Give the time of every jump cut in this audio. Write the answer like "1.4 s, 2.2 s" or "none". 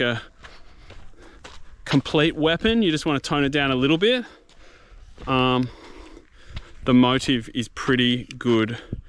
none